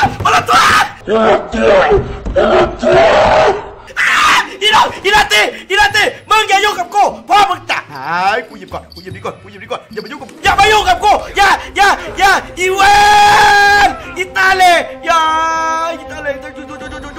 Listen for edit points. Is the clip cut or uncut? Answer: cut